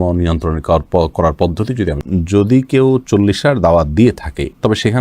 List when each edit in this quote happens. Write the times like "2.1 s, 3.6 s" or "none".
2.0 s